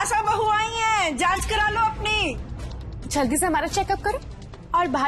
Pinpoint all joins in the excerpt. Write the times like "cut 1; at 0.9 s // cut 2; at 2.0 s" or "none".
cut 1; at 2.4 s